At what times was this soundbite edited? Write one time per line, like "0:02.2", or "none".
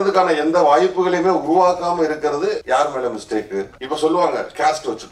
0:02.6
0:03.8